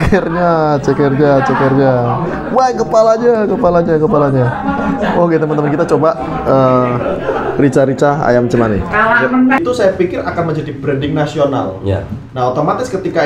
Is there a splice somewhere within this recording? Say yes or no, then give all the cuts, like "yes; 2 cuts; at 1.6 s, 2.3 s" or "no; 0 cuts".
yes; 1 cut; at 9.6 s